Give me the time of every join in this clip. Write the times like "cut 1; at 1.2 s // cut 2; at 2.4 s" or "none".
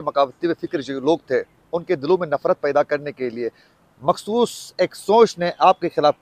none